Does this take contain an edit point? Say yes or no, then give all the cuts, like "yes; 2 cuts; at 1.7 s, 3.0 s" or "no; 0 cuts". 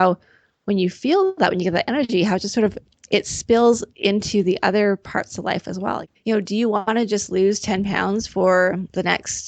yes; 1 cut; at 6.1 s